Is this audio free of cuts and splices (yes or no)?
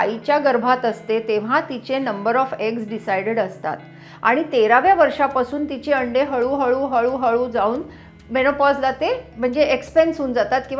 no